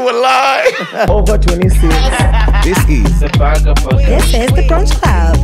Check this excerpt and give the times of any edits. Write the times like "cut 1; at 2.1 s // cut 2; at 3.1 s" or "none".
cut 1; at 1.1 s

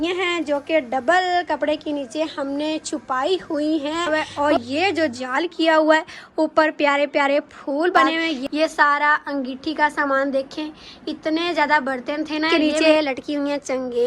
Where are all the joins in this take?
cut 1; at 4.1 s // cut 2; at 8.4 s // cut 3; at 12.5 s

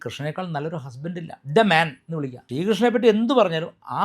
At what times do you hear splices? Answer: cut 1; at 2.4 s

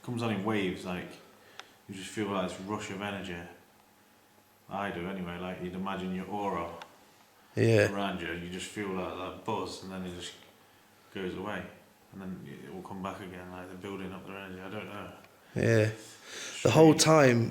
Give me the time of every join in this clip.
none

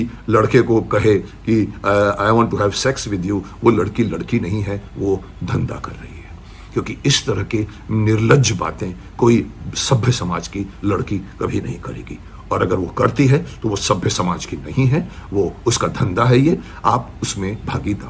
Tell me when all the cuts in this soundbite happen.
none

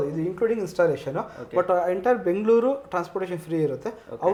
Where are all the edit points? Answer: none

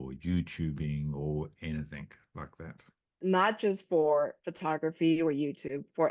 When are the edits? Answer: cut 1; at 3.1 s

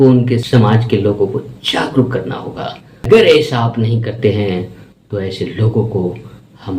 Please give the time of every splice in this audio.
cut 1; at 3.1 s

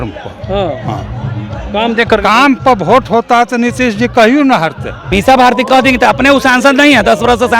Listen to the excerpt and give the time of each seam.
cut 1; at 5.0 s

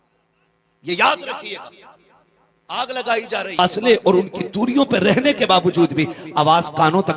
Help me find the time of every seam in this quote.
cut 1; at 3.6 s

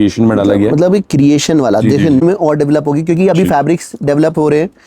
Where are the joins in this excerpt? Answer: cut 1; at 2.2 s

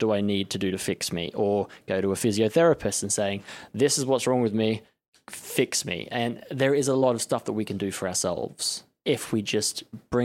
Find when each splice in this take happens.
cut 1; at 7.0 s

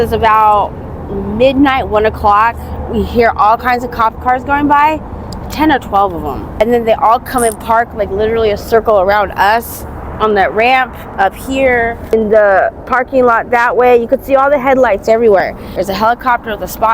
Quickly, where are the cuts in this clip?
cut 1; at 6.4 s // cut 2; at 11.0 s // cut 3; at 12.1 s // cut 4; at 15.6 s

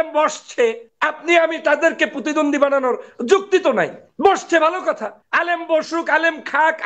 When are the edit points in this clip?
cut 1; at 0.9 s // cut 2; at 4.0 s // cut 3; at 5.2 s

